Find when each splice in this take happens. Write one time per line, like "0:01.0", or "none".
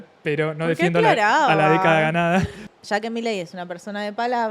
0:02.6

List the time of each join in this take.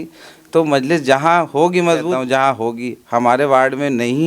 0:02.2

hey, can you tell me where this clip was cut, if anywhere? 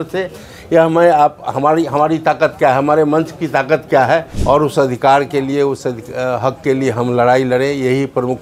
0:04.3

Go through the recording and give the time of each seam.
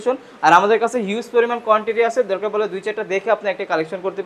none

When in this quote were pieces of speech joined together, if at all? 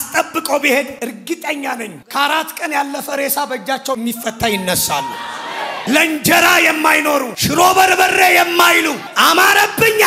0:00.9
0:04.0
0:05.8
0:07.4

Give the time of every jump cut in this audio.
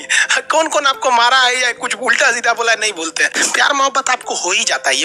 0:03.3

